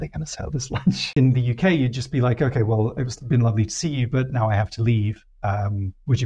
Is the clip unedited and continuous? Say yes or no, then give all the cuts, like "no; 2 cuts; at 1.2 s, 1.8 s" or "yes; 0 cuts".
no; 1 cut; at 1.1 s